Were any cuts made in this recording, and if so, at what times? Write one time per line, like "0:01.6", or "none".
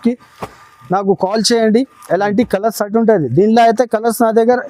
none